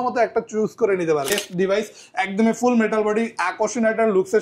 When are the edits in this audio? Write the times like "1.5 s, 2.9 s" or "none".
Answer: 1.3 s